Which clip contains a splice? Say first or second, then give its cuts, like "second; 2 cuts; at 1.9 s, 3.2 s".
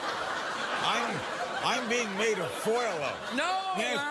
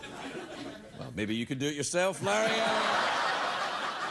second; 1 cut; at 2.8 s